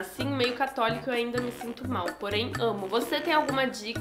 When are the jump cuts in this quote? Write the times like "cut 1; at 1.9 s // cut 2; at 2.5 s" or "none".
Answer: cut 1; at 2.8 s

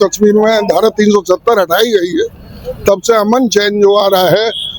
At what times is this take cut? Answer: none

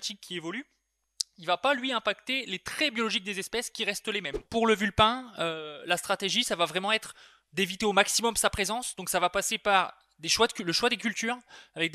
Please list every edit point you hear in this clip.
cut 1; at 4.4 s

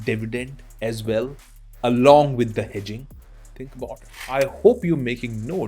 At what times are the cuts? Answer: cut 1; at 4.3 s

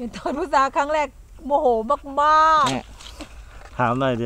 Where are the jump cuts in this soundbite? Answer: cut 1; at 1.3 s // cut 2; at 2.7 s

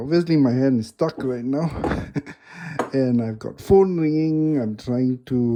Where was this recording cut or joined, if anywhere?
none

